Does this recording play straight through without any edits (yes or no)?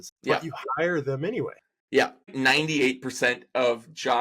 no